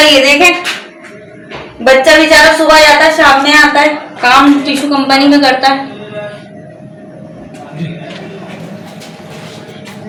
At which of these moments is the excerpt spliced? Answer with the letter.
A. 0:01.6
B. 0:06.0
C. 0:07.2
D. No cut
D